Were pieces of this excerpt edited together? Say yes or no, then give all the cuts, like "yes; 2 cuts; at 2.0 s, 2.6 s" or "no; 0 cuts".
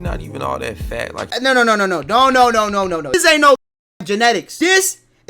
yes; 3 cuts; at 1.3 s, 3.1 s, 4.5 s